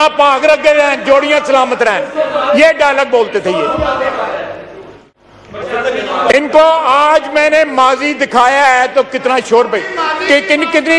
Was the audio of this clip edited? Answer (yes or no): no